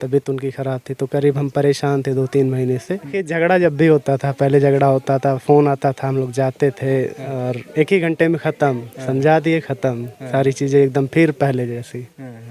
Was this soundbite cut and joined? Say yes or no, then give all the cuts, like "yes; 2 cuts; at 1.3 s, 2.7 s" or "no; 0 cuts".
yes; 1 cut; at 3.0 s